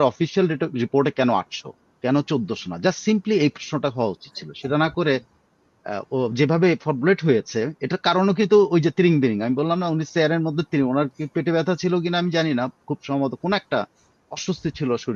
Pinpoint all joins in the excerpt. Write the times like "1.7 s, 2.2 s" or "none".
none